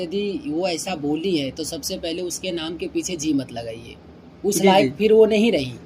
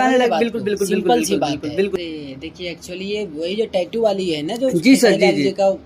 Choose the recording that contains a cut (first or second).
second